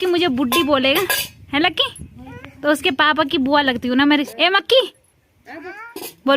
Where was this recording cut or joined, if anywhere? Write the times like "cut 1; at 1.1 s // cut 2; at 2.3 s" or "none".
cut 1; at 4.3 s